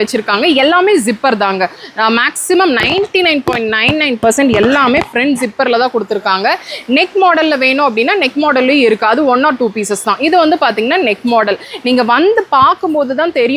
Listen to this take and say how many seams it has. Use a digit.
0